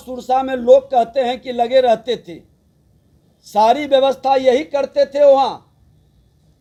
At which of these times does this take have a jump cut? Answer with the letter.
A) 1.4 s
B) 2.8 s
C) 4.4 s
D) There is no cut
D